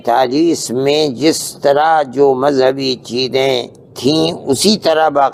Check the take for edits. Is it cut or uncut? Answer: uncut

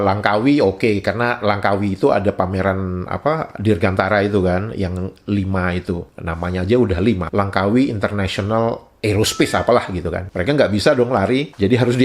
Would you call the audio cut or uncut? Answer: uncut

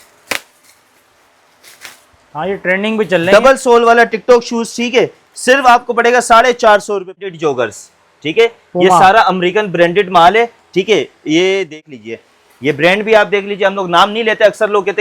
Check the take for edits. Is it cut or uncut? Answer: cut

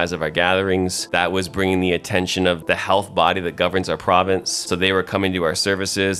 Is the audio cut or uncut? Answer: cut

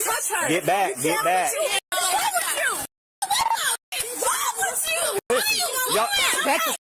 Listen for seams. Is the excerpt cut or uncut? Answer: uncut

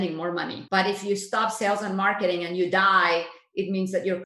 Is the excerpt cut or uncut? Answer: uncut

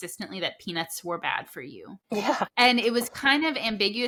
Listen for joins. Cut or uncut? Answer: uncut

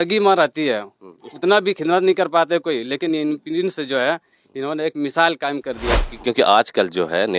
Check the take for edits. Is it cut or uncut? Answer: cut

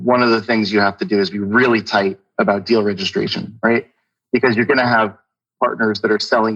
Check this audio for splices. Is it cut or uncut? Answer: uncut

